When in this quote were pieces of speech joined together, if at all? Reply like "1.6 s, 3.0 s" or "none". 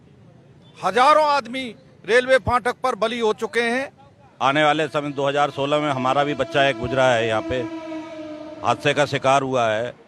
4.3 s